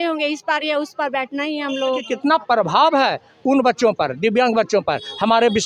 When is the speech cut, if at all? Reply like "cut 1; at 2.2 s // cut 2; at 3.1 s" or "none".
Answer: cut 1; at 2.1 s